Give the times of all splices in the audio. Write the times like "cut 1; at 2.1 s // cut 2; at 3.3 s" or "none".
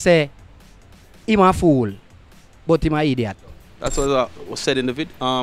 cut 1; at 3.9 s

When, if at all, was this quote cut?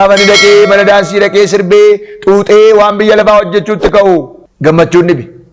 cut 1; at 4.4 s

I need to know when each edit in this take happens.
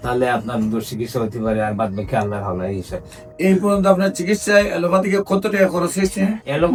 none

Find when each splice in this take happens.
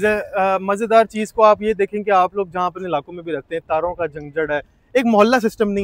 none

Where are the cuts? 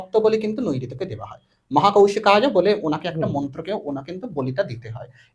none

